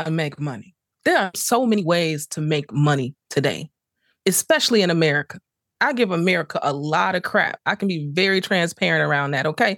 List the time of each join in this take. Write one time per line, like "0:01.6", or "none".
0:01.4